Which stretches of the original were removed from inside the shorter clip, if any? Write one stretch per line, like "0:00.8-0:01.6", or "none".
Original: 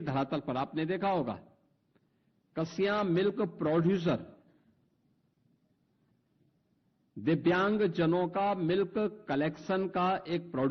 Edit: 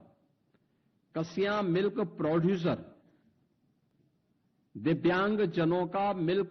0:05.3-0:06.3